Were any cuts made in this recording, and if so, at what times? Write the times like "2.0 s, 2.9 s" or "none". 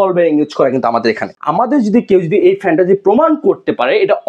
1.3 s